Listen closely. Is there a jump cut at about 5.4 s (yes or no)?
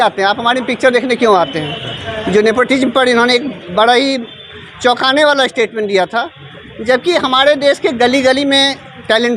no